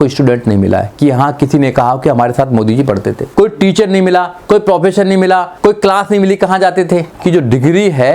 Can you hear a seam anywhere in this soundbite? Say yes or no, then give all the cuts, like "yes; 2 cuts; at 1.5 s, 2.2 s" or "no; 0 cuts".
yes; 3 cuts; at 3.2 s, 5.5 s, 7.1 s